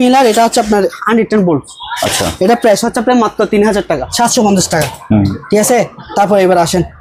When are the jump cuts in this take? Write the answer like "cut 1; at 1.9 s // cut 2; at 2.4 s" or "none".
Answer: cut 1; at 4.1 s